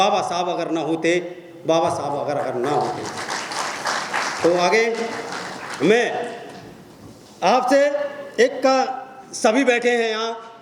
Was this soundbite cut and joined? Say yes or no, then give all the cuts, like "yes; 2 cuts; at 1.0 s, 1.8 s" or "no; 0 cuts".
no; 0 cuts